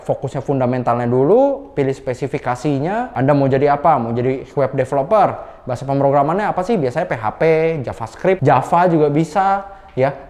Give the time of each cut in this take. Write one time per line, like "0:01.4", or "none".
0:03.1